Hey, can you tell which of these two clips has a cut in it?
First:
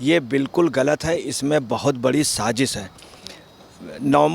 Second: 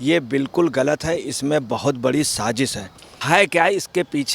second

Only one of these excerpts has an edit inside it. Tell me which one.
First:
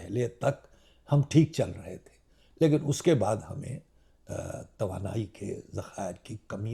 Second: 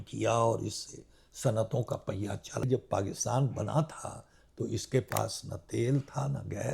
second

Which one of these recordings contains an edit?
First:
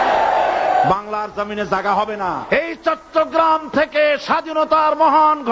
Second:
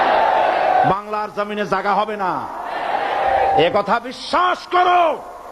first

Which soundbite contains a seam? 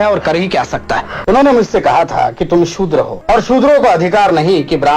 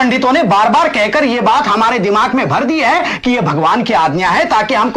first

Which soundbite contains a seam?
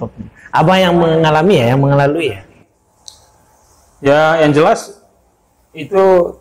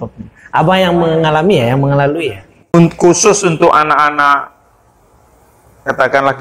second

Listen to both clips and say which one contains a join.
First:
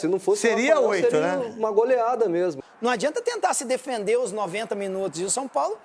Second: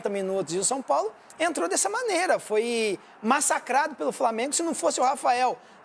first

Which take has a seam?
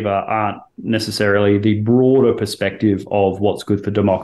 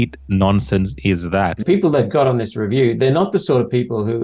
second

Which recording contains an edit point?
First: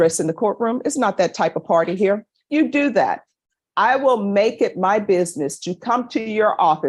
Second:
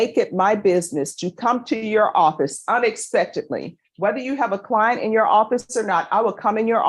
first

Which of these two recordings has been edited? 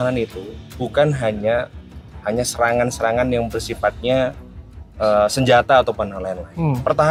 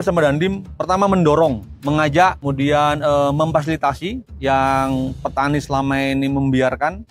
second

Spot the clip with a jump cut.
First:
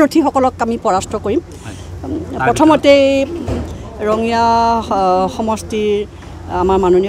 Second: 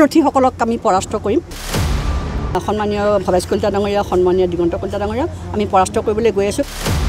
first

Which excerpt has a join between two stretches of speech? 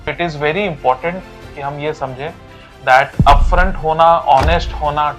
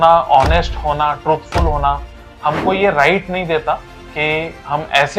second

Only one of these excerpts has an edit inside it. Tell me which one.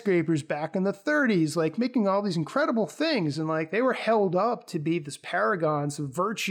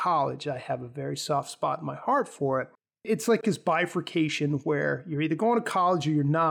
second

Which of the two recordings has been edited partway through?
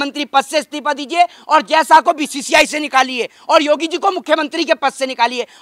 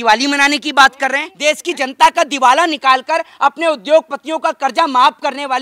second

